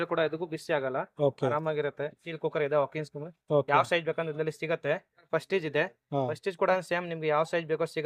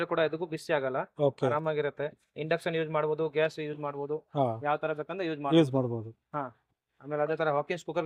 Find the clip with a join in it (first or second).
first